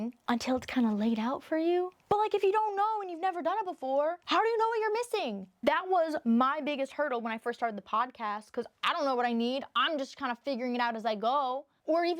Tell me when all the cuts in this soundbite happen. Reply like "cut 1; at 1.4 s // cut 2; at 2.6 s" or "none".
none